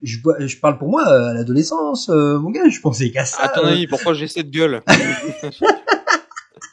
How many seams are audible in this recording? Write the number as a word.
zero